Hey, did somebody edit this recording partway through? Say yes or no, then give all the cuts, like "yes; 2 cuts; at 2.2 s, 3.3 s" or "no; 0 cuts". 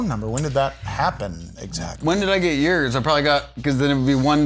no; 0 cuts